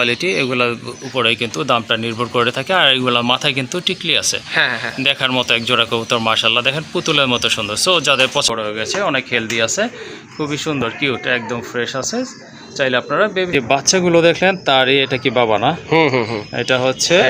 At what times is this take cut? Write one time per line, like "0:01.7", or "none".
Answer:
0:08.5
0:13.6